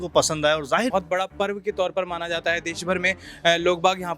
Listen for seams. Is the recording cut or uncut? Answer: cut